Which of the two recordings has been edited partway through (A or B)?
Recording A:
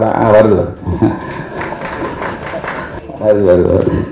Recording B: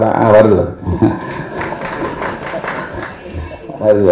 A